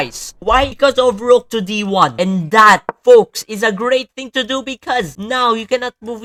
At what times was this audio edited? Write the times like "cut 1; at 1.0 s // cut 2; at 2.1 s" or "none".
none